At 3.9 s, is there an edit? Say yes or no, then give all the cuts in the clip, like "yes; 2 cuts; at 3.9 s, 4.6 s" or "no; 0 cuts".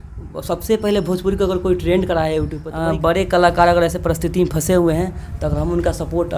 no; 1 cut; at 2.6 s